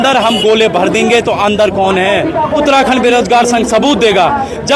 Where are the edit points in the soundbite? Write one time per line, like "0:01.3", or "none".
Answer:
0:02.6